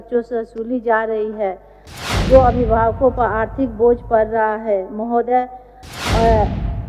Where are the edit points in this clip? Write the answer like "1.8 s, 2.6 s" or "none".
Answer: none